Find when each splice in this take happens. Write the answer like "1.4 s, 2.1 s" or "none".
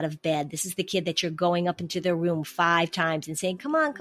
none